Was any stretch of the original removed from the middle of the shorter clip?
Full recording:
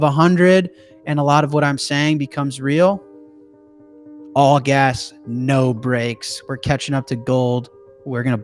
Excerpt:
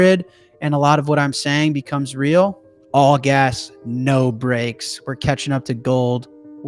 yes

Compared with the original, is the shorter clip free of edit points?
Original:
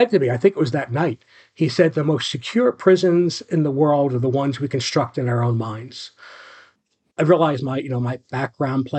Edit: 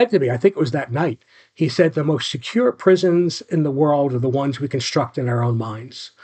yes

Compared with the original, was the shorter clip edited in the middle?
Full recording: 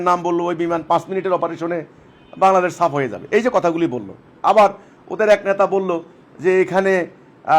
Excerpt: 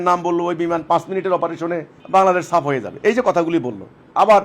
yes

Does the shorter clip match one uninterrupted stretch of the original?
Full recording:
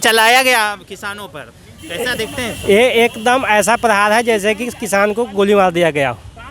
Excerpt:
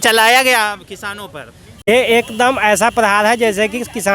no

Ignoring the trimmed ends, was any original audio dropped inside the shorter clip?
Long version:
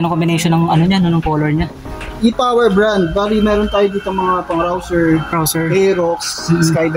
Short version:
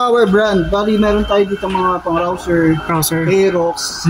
no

